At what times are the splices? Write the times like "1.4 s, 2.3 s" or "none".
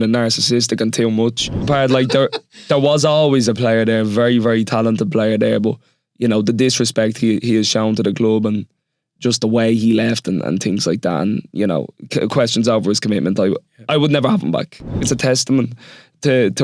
1.6 s, 15.0 s